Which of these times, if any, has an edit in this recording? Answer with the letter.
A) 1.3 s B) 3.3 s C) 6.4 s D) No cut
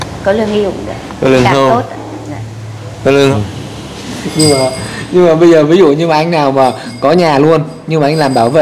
B